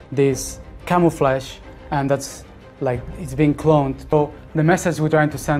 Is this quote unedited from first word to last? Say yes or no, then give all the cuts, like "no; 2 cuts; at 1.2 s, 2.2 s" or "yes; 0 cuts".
no; 1 cut; at 4.1 s